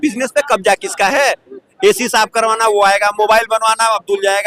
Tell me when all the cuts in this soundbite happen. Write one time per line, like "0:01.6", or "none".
none